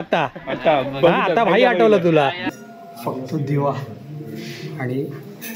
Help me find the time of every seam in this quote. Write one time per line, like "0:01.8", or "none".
0:02.4